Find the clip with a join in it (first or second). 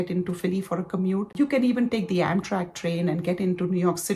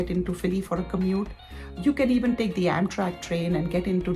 first